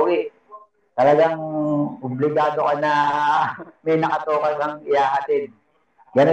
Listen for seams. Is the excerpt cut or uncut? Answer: uncut